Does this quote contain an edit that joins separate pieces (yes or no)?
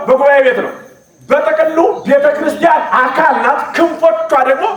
no